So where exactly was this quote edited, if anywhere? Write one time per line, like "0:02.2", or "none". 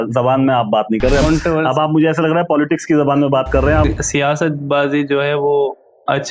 0:01.2
0:03.9